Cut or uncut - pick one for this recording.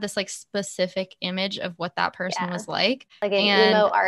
cut